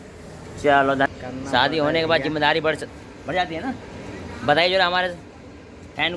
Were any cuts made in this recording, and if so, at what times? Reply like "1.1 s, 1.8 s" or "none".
1.1 s

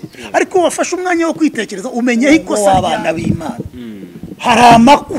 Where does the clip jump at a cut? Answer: 2.5 s

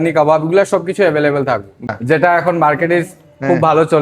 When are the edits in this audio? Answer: 1.9 s

